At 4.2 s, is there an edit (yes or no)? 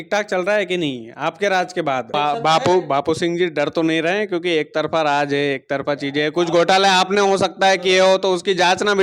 no